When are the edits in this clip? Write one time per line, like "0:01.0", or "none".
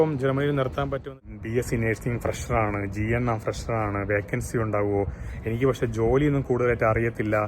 0:01.1